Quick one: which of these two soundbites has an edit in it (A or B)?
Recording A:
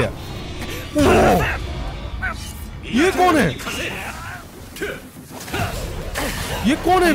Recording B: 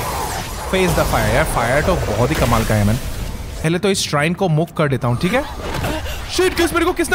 B